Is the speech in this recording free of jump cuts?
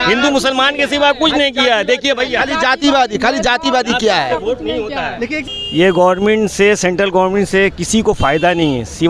no; 1 cut; at 5.5 s

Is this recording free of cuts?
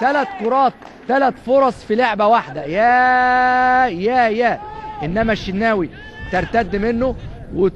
no; 1 cut; at 4.0 s

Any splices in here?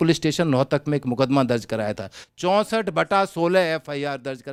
no; 0 cuts

